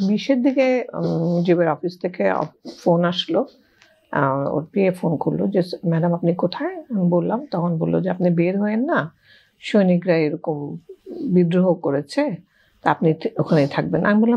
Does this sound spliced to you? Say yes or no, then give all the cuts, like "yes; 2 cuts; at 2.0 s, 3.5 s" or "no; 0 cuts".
no; 0 cuts